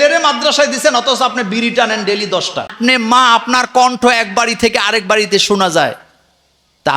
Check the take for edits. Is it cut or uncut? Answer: cut